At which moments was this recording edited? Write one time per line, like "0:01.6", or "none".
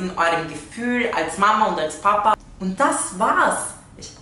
0:02.3